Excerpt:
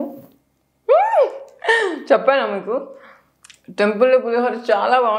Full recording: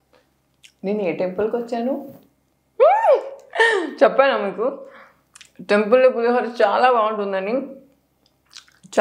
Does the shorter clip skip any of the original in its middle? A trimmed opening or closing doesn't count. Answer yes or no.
no